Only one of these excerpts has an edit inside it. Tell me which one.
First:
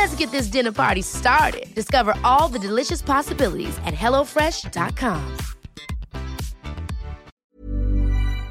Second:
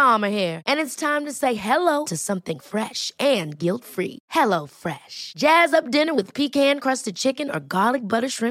first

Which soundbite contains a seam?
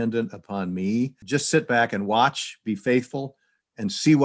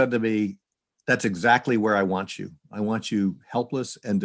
first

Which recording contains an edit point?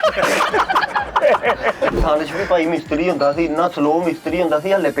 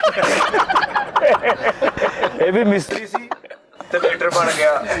first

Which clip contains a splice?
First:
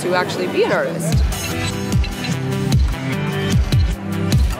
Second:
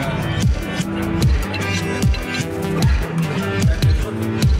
second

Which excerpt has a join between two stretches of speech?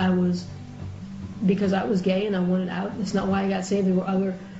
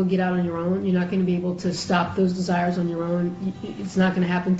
first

